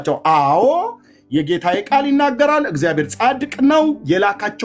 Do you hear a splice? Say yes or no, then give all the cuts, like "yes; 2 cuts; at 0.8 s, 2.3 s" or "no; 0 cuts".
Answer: no; 0 cuts